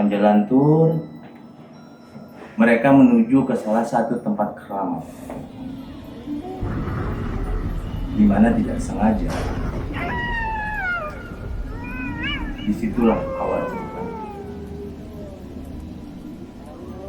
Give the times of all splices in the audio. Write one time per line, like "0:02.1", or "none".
none